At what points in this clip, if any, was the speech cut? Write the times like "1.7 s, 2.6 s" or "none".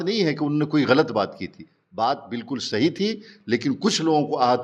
none